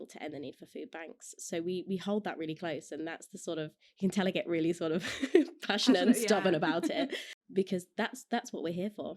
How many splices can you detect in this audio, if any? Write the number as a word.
one